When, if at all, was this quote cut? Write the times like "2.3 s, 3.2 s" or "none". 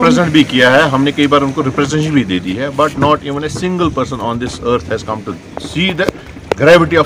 none